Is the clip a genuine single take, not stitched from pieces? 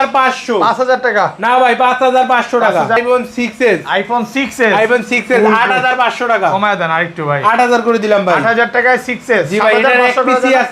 no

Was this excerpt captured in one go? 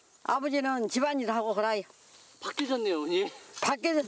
yes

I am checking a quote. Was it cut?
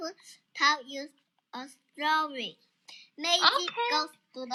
no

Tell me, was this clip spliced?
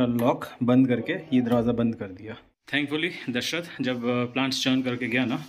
no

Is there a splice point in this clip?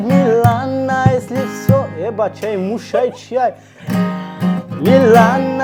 no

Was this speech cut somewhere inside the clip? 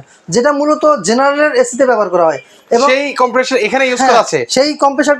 no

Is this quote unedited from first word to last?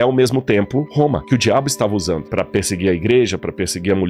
yes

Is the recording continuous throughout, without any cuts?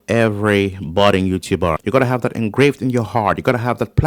yes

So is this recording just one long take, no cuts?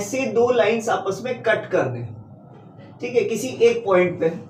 yes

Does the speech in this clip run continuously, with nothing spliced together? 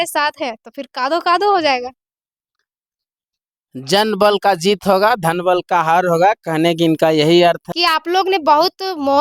no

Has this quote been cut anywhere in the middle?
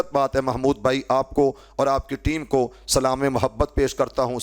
no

